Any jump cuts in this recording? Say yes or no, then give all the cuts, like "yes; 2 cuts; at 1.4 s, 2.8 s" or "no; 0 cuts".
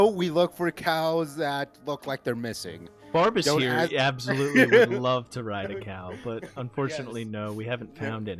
no; 0 cuts